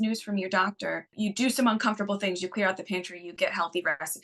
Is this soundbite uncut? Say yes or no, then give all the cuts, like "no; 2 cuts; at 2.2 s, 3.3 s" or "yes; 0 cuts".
no; 1 cut; at 1.1 s